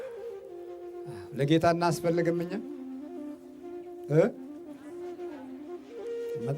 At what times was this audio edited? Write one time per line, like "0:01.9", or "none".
0:01.3